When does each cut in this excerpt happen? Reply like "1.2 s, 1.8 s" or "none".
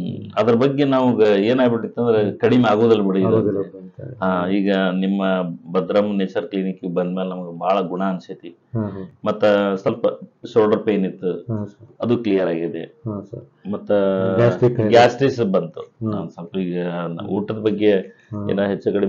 none

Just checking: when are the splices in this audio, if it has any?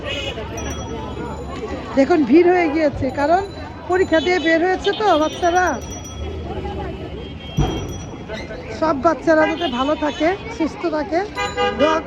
none

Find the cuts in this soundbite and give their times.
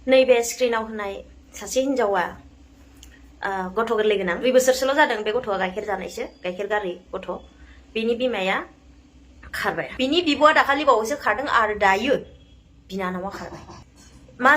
4.4 s, 9.9 s, 13.7 s

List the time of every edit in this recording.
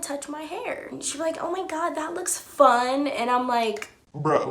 none

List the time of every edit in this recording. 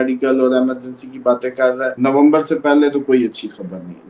1.9 s

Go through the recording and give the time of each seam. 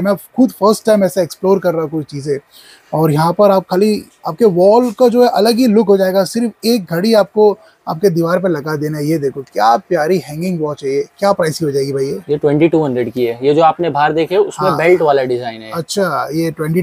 none

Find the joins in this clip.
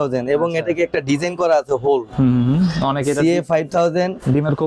none

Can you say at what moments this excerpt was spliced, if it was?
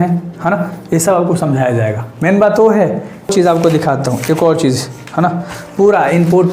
3.3 s

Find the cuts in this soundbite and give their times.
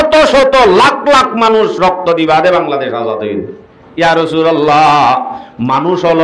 3.8 s

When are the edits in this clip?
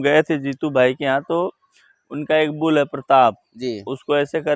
none

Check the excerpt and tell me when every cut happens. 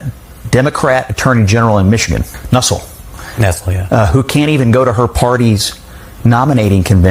none

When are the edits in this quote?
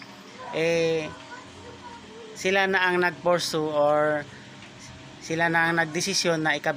none

